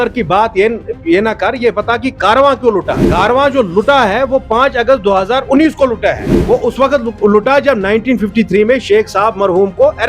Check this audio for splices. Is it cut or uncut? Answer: cut